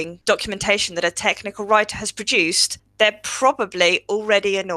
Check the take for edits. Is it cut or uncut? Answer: uncut